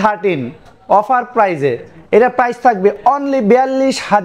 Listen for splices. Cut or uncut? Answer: uncut